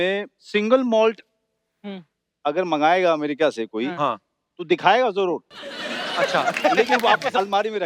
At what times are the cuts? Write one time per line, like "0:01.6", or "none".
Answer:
none